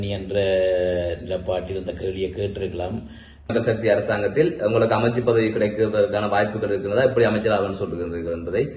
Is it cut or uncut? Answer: cut